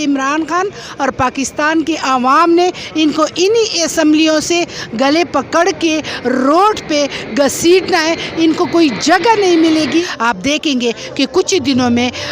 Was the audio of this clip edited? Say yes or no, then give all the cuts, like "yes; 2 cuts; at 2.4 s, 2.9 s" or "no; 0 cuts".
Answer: yes; 1 cut; at 10.1 s